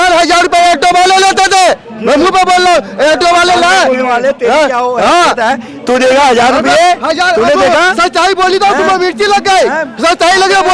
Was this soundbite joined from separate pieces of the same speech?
no; 0 cuts

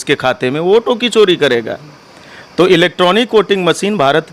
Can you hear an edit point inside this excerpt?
no; 0 cuts

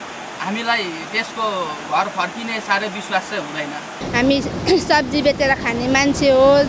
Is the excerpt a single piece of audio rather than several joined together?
no; 1 cut; at 4.0 s

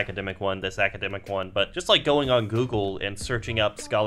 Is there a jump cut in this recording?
yes; 1 cut; at 1.8 s

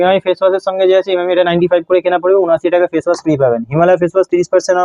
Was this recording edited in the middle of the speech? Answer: no; 0 cuts

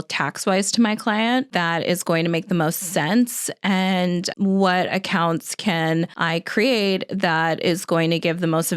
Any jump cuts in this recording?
yes; 3 cuts; at 1.5 s, 4.3 s, 6.2 s

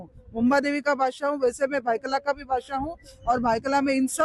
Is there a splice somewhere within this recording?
no; 0 cuts

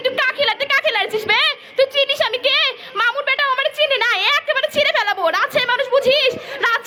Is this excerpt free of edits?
yes; 0 cuts

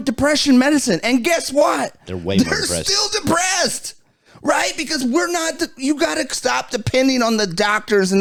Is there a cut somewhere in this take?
no; 0 cuts

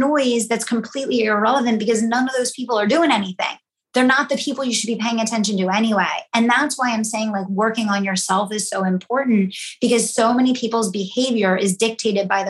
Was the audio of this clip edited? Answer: no; 0 cuts

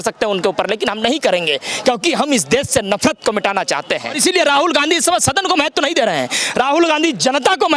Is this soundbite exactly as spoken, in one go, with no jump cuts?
no; 1 cut; at 4.2 s

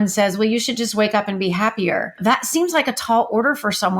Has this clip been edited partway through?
yes; 1 cut; at 2.2 s

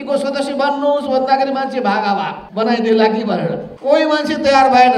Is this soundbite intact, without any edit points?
no; 2 cuts; at 2.4 s, 3.7 s

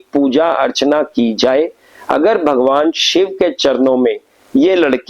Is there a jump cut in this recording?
no; 0 cuts

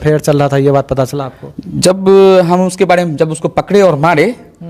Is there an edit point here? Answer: no; 0 cuts

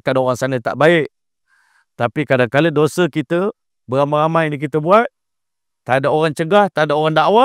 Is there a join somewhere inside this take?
no; 0 cuts

